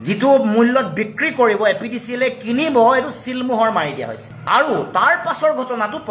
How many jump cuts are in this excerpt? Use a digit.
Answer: 0